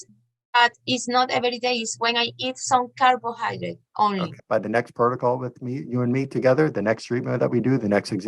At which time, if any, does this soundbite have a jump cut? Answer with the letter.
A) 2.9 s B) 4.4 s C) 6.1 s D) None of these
B